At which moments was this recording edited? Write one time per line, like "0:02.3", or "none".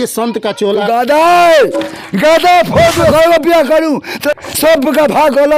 0:03.1
0:04.3